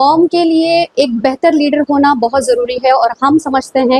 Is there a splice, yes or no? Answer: no